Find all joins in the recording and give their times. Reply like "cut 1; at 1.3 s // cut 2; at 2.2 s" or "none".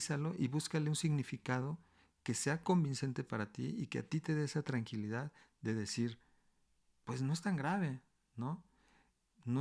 none